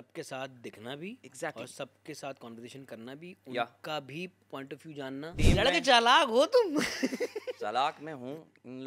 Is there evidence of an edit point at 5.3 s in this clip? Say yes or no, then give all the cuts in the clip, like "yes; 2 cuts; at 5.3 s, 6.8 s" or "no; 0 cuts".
yes; 1 cut; at 5.3 s